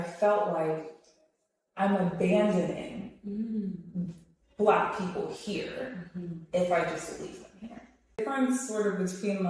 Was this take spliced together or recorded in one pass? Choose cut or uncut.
cut